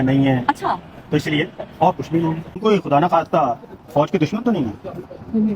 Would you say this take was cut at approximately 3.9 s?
no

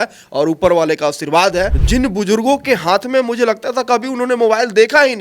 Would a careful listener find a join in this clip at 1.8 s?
yes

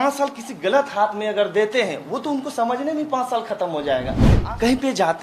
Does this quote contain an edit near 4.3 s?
yes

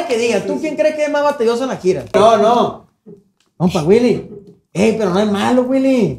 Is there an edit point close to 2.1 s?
yes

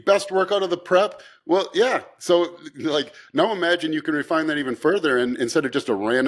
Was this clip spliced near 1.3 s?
no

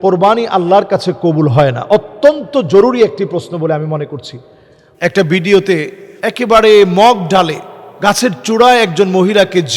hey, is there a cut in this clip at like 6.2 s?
no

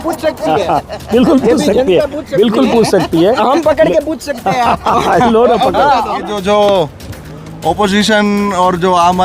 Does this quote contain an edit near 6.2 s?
yes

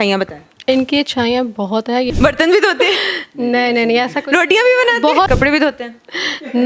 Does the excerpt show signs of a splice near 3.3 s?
no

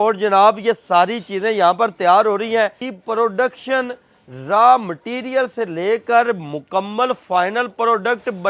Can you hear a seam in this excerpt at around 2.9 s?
yes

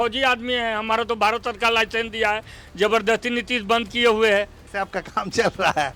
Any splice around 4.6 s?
yes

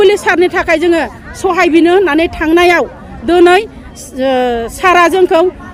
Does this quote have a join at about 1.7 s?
no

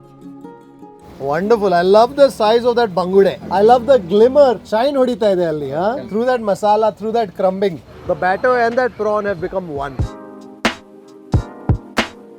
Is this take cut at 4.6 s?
yes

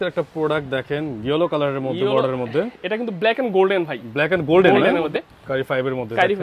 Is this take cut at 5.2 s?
yes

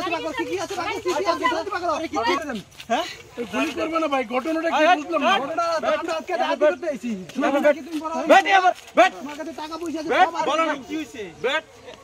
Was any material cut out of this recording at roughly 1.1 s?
no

